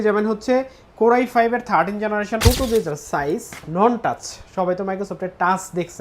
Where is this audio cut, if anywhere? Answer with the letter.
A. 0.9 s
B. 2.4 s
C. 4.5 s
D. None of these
B